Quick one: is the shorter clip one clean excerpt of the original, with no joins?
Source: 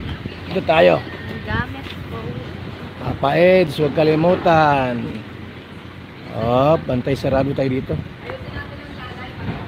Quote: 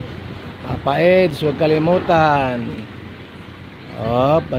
yes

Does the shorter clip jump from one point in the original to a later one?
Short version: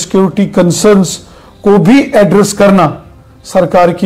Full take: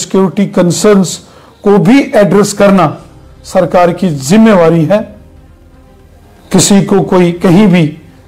no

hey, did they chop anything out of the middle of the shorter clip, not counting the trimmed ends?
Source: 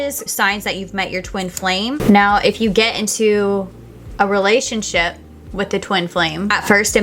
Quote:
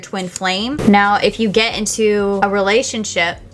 yes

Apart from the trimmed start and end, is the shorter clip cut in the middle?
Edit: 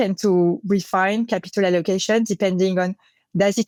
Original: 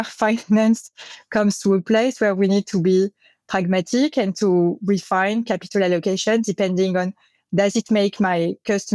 no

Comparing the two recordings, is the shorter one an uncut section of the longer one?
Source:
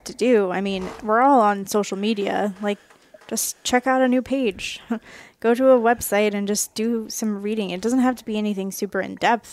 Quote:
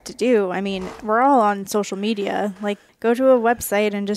no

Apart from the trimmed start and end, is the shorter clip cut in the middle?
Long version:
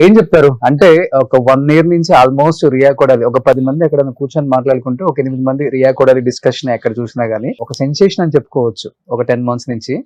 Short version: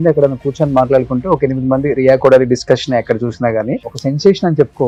no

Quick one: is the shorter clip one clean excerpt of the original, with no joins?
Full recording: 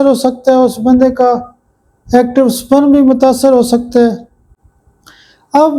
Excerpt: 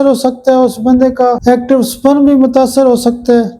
no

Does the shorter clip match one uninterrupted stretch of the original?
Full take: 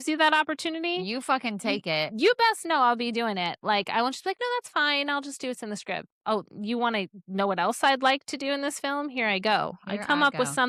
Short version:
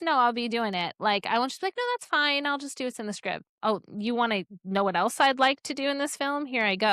yes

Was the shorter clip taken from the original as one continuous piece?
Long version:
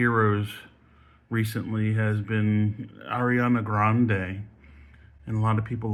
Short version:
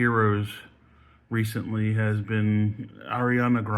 yes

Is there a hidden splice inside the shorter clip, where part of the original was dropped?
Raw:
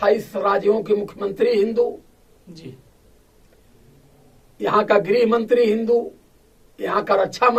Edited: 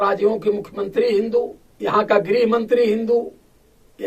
yes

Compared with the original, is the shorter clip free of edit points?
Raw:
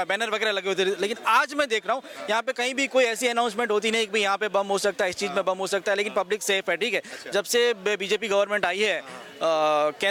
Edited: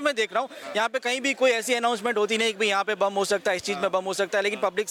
yes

